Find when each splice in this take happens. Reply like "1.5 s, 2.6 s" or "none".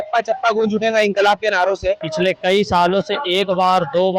2.1 s